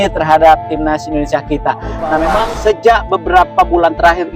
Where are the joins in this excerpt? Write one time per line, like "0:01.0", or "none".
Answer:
0:02.4